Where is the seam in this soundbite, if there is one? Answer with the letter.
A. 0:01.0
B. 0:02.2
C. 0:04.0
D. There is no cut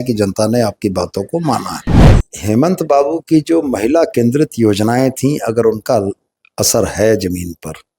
B